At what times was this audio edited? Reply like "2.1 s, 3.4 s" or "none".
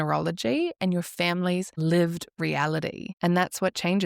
1.7 s, 3.1 s